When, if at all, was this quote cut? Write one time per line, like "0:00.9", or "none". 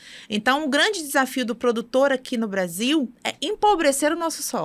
0:03.2